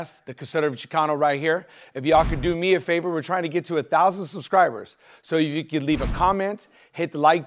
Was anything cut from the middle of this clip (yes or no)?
no